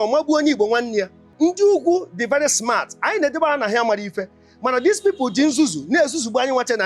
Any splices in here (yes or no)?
yes